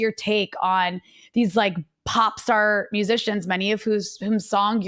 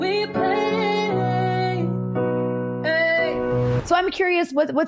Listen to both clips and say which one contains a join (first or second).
second